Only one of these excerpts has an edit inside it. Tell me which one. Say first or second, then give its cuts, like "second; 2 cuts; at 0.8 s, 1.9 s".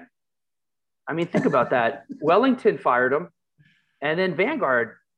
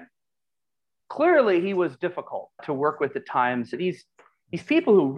second; 2 cuts; at 1.0 s, 3.8 s